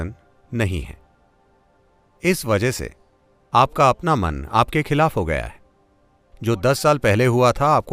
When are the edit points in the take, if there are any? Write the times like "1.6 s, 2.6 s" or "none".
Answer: none